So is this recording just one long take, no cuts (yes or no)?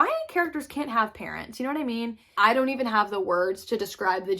no